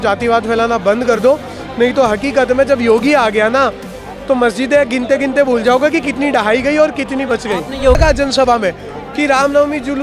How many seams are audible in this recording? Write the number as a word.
one